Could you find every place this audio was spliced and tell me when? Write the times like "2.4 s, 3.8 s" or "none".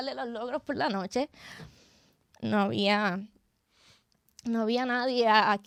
none